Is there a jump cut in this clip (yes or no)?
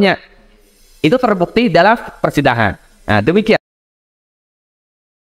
no